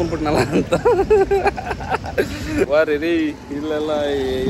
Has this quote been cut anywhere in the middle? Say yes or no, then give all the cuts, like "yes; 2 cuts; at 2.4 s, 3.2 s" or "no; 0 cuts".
yes; 1 cut; at 2.7 s